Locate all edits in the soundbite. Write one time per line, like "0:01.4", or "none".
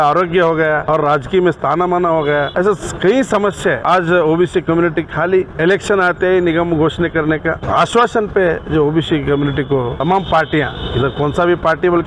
0:00.8
0:02.5
0:03.8
0:05.5
0:07.6
0:09.9